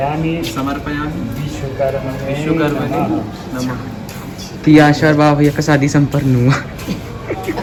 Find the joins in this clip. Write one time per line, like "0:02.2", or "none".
none